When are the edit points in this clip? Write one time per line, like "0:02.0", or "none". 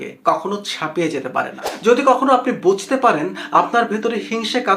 0:01.8